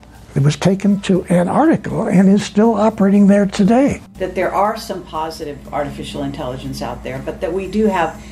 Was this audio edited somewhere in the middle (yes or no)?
yes